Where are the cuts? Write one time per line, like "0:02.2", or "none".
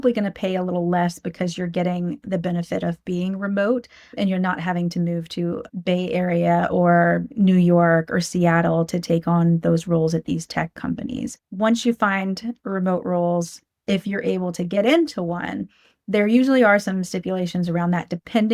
0:04.1
0:05.7
0:11.4